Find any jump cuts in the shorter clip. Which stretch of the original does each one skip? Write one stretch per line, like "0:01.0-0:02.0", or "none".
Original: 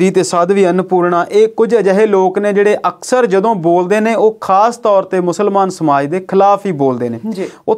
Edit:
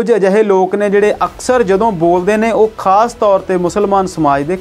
none